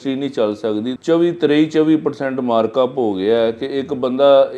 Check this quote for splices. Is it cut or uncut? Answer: cut